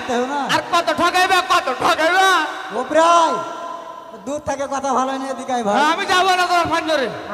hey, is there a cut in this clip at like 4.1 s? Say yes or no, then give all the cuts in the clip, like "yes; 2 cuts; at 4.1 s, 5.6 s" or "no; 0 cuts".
no; 0 cuts